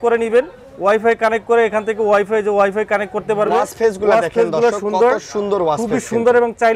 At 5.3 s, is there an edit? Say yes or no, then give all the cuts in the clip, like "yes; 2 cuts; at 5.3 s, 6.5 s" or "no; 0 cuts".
no; 1 cut; at 3.5 s